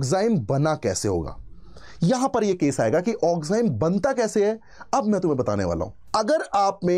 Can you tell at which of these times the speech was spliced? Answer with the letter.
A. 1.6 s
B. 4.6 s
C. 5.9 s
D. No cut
C